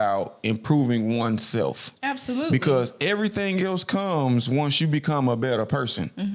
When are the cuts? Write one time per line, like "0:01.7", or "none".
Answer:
none